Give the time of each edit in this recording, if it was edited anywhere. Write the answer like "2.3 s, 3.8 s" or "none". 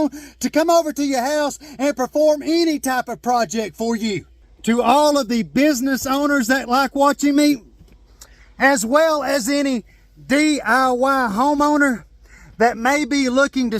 4.3 s